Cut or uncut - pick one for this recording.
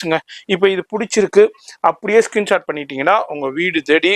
uncut